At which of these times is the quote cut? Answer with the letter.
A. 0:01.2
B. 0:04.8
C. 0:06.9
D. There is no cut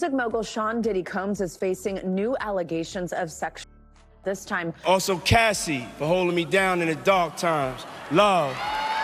B